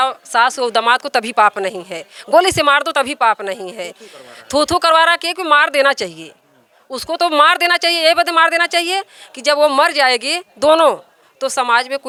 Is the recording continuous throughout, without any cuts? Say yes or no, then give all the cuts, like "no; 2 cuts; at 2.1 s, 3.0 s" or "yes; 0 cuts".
yes; 0 cuts